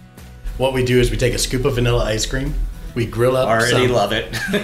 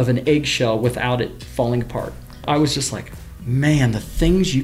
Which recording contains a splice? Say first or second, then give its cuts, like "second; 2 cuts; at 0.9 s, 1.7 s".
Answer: second; 2 cuts; at 1.4 s, 2.4 s